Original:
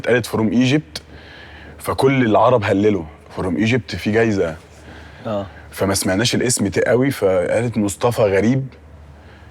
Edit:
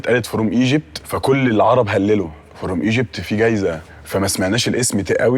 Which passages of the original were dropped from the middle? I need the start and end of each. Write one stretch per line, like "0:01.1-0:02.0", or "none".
0:01.0-0:01.8
0:04.7-0:05.6